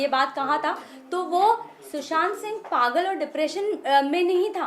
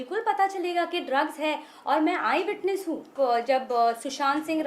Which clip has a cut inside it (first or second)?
second